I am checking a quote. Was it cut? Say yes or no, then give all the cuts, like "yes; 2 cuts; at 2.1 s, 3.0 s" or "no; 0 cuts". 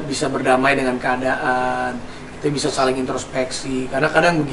no; 0 cuts